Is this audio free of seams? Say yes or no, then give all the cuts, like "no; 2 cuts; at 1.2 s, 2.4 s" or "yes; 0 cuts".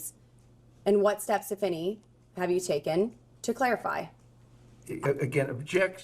yes; 0 cuts